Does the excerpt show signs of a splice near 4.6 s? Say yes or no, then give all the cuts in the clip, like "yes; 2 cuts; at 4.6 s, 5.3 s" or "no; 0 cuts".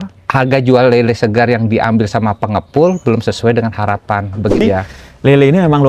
yes; 1 cut; at 4.6 s